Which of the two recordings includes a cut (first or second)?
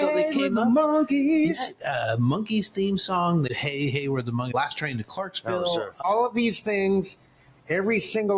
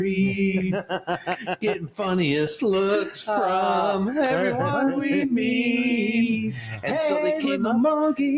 first